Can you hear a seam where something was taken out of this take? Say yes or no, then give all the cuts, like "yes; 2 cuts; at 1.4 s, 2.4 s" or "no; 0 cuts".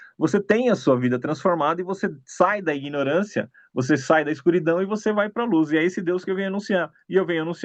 no; 0 cuts